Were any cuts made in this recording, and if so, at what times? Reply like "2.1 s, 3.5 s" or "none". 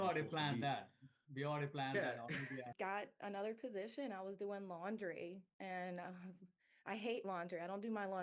2.7 s